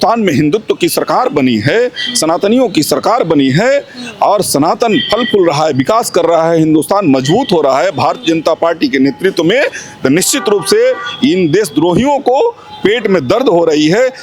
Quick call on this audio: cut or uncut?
uncut